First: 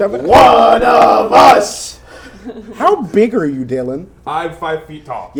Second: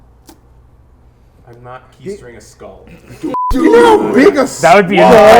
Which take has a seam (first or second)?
second